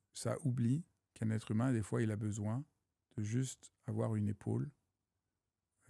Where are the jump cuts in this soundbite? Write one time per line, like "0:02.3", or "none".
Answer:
none